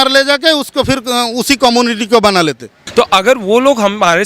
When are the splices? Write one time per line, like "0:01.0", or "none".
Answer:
0:02.7